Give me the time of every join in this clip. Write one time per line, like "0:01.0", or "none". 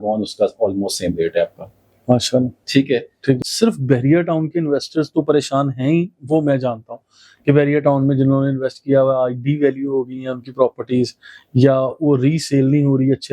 0:03.4